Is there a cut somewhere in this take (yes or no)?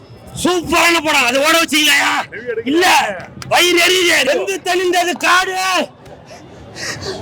yes